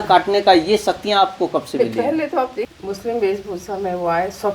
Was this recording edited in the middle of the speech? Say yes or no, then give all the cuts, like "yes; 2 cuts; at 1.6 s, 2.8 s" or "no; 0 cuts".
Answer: yes; 1 cut; at 2.8 s